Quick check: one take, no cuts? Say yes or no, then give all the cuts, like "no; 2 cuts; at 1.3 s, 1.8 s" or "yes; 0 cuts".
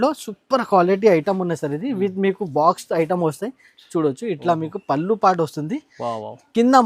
yes; 0 cuts